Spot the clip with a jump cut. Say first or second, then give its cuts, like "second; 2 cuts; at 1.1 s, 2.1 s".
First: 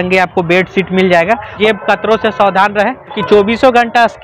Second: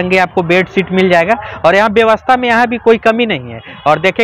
first; 2 cuts; at 1.5 s, 3.2 s